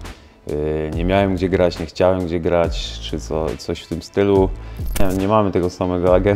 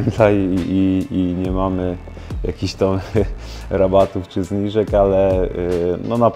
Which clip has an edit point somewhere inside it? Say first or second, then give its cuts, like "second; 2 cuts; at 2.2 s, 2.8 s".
first; 1 cut; at 5.0 s